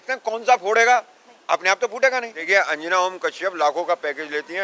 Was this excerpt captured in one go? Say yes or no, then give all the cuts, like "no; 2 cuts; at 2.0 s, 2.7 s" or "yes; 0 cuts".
no; 1 cut; at 2.5 s